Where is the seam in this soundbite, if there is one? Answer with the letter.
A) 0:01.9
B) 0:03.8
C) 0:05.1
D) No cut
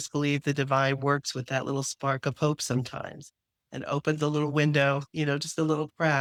D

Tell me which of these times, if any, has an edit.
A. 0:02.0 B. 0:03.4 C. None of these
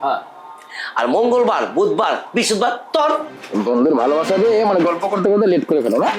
B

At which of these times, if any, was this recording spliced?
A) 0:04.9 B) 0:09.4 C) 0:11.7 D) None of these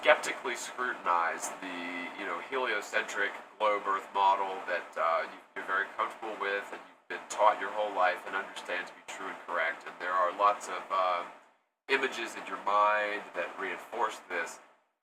D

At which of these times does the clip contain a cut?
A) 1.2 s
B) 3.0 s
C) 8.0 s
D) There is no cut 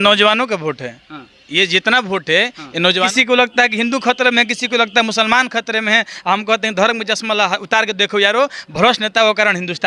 B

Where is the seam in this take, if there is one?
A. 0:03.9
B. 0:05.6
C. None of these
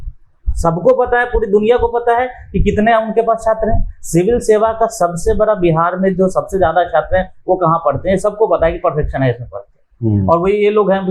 C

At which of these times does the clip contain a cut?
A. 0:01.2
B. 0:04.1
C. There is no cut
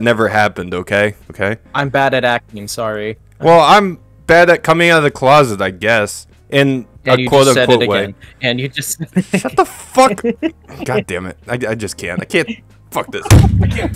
A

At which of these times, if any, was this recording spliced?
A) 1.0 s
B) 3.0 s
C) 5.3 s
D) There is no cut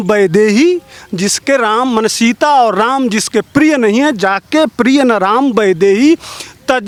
D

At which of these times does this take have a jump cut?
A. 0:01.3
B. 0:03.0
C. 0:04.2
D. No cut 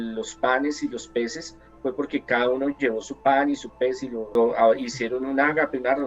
C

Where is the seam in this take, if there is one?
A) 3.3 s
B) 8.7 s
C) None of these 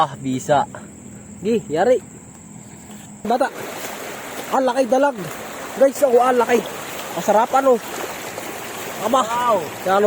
A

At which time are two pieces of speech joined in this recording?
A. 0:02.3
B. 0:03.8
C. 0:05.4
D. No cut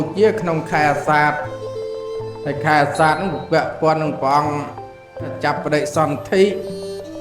C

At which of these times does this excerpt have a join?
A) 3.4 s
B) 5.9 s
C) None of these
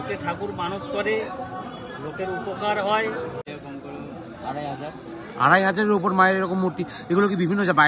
A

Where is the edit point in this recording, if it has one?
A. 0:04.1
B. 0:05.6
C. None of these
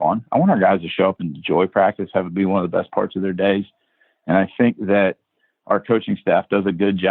C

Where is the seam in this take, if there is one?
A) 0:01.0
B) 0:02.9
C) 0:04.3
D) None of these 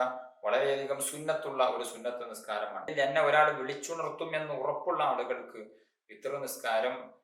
B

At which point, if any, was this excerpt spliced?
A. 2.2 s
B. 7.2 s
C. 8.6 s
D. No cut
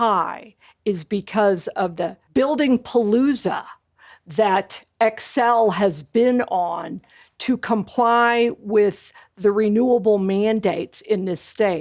A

